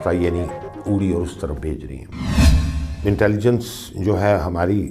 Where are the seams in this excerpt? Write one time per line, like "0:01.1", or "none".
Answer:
0:02.5

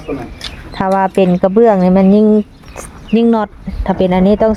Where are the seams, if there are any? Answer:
none

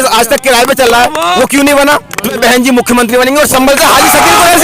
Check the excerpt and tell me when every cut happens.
0:02.3

